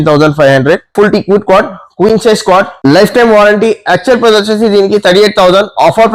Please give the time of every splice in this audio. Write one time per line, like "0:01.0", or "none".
0:00.9